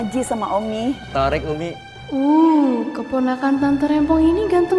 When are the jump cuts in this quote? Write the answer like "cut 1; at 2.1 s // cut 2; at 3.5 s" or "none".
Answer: cut 1; at 1.0 s // cut 2; at 1.9 s